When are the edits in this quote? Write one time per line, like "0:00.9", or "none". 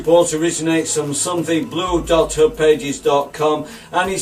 0:03.0